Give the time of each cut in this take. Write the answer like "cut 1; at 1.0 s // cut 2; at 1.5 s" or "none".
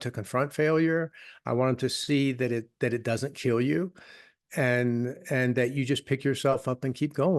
none